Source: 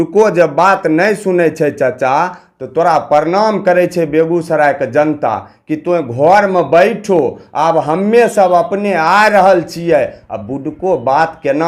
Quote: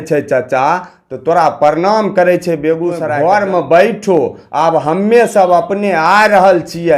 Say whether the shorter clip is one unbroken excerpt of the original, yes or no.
no